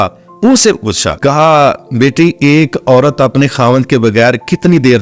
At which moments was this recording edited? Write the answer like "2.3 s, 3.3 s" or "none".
1.1 s